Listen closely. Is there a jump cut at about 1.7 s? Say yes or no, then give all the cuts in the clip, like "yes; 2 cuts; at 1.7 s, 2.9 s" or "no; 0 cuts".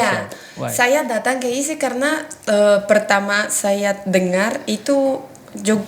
no; 0 cuts